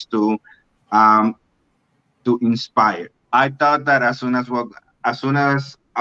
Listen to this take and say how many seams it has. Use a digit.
1